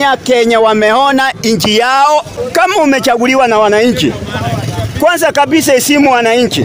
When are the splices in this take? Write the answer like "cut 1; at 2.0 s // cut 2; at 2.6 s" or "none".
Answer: cut 1; at 2.3 s